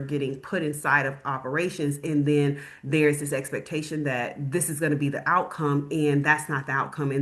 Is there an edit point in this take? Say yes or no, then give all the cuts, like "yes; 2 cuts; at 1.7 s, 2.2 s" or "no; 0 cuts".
no; 0 cuts